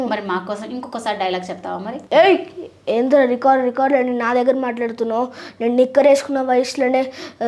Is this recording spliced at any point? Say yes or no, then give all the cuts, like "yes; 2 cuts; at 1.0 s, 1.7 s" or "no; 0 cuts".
no; 0 cuts